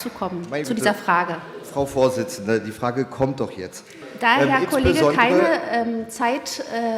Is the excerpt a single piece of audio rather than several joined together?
no; 1 cut; at 4.0 s

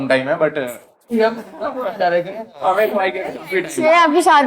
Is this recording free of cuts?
yes; 0 cuts

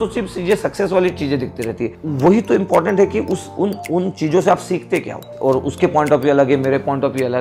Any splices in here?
yes; 2 cuts; at 2.0 s, 5.2 s

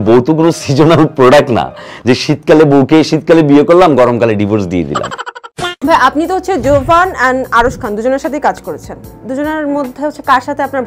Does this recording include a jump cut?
no; 0 cuts

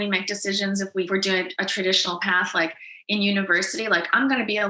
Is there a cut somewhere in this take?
yes; 1 cut; at 1.1 s

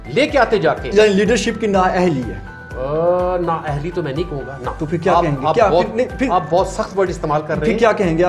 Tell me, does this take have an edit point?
no; 0 cuts

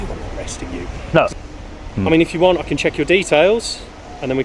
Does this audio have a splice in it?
yes; 1 cut; at 1.3 s

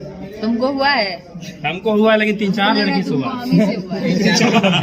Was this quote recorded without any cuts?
yes; 0 cuts

